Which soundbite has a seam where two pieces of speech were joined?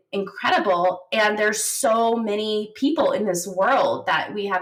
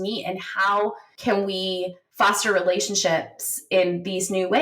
second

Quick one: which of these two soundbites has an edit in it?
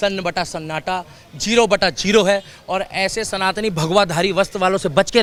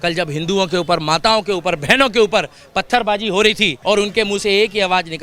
second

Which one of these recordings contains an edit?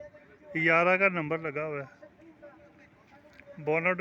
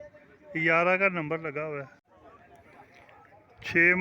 second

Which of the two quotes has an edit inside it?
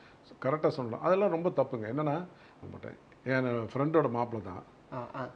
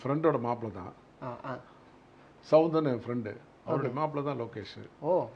first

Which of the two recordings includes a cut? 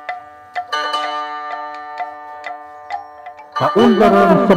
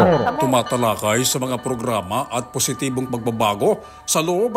first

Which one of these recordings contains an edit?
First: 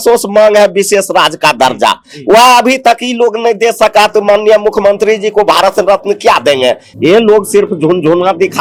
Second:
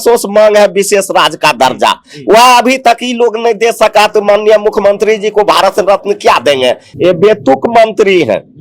second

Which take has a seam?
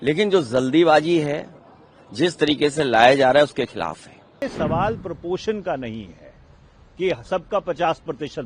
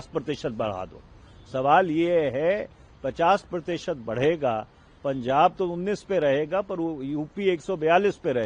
first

